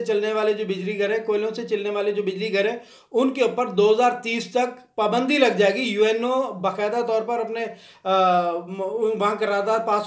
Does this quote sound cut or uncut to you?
uncut